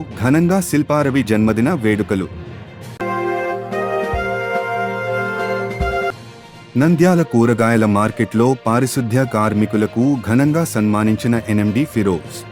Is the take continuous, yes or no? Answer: yes